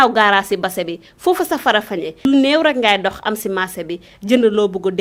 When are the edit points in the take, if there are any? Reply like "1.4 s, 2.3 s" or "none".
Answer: none